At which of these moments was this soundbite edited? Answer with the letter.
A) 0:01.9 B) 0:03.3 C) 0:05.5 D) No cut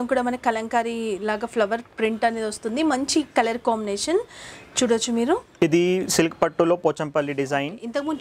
C